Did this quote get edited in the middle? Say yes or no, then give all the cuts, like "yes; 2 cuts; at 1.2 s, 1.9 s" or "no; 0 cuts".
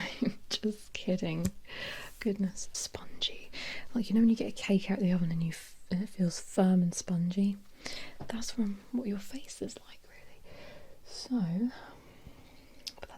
yes; 1 cut; at 2.7 s